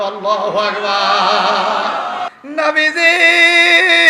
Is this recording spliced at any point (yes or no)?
yes